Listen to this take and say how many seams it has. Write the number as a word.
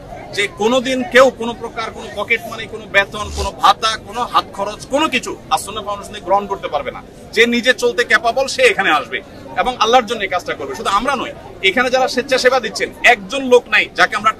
zero